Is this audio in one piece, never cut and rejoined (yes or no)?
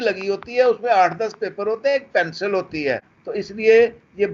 no